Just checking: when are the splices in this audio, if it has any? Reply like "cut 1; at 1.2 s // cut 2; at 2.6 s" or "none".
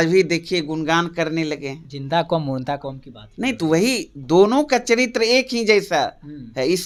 none